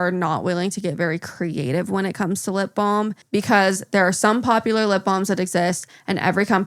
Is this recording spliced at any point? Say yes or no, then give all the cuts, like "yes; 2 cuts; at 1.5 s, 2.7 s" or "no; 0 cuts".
no; 0 cuts